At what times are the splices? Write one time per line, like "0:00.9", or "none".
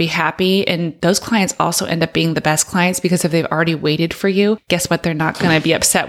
0:00.9
0:04.6